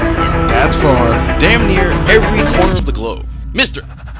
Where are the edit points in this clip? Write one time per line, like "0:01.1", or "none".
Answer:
none